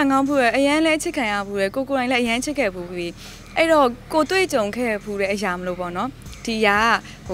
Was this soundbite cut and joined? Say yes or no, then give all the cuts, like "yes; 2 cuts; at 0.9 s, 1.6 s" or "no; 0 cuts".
no; 0 cuts